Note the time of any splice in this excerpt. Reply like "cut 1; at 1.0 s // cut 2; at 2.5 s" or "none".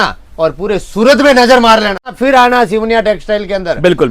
cut 1; at 2.2 s